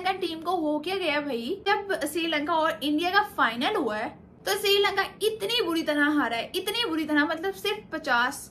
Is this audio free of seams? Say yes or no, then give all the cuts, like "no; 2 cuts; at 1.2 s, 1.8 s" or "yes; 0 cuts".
no; 1 cut; at 1.6 s